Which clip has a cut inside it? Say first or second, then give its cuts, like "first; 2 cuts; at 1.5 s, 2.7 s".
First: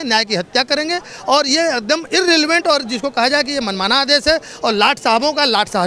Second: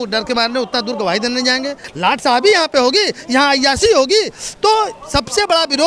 second; 1 cut; at 1.8 s